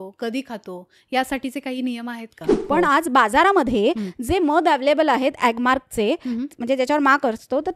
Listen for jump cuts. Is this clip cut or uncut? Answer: cut